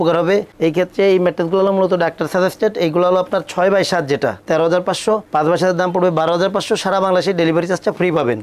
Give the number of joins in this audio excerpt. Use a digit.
0